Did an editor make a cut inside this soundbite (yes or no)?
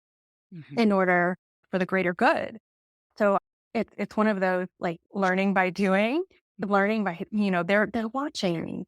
yes